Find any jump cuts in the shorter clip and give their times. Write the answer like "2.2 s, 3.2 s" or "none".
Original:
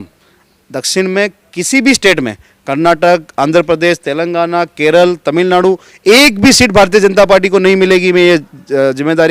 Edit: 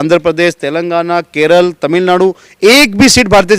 none